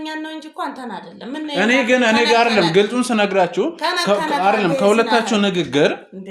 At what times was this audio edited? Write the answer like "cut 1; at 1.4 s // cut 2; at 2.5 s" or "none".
none